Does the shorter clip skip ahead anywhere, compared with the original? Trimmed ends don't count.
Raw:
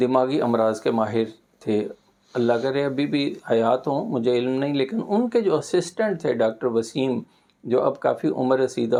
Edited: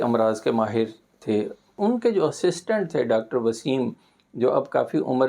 yes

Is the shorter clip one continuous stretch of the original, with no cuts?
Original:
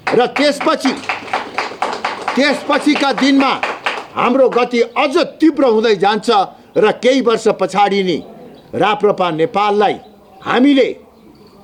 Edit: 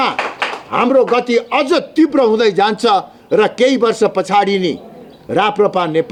yes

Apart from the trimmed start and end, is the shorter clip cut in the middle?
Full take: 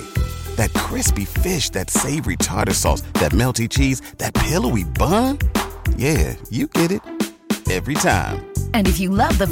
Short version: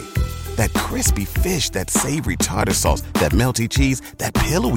no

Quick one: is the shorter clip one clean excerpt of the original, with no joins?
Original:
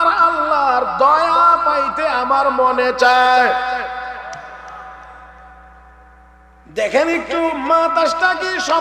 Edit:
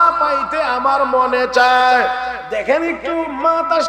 no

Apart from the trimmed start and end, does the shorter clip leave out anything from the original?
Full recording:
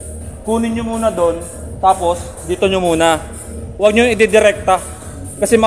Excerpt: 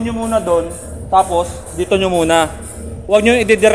no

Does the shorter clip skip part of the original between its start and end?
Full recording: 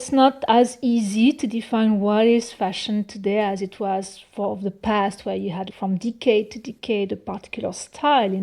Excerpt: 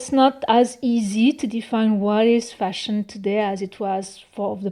no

